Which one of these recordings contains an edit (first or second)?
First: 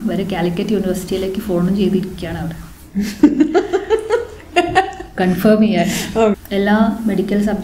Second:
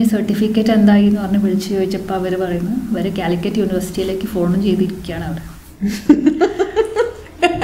first